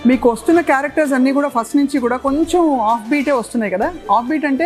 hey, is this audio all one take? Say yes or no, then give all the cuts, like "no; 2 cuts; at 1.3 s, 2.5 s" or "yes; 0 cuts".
yes; 0 cuts